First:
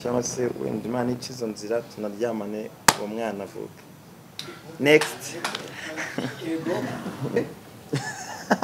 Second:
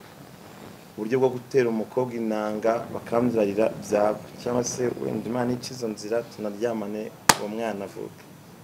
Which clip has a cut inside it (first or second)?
first